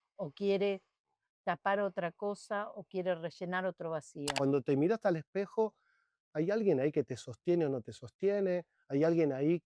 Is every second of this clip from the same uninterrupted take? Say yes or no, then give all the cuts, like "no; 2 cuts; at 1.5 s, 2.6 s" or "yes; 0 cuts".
no; 1 cut; at 4.3 s